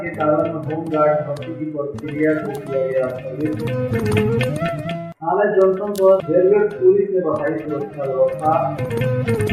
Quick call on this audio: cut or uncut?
uncut